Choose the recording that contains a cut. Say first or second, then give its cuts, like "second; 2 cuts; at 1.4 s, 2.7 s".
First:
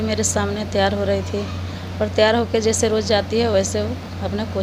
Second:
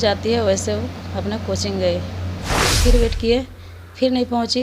second; 1 cut; at 2.8 s